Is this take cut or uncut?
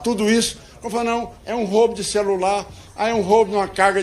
uncut